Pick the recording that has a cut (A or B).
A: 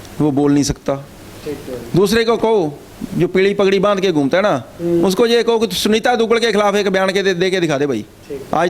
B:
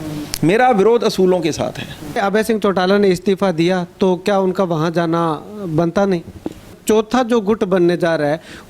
B